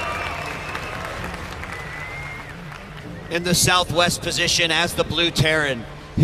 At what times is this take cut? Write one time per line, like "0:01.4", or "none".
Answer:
0:01.3

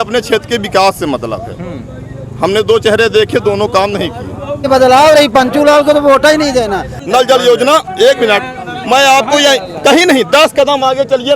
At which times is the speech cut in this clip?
0:04.7
0:06.9

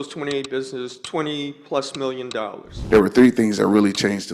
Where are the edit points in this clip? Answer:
0:01.0
0:02.7

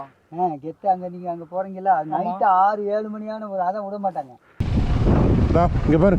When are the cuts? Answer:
0:04.5

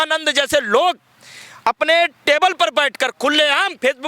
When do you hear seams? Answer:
none

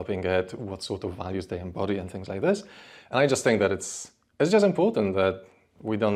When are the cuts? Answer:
none

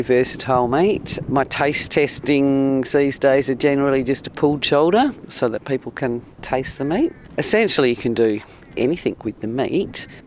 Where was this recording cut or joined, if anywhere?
none

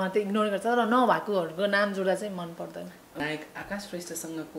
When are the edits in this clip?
0:03.2

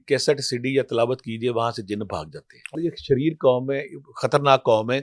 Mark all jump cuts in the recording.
0:02.8

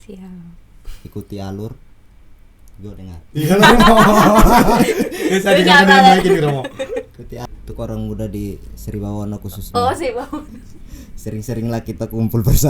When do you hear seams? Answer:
0:07.4

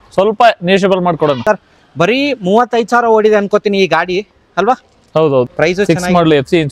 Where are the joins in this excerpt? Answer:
0:01.4
0:05.5

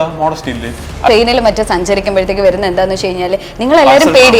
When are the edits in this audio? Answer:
0:01.1

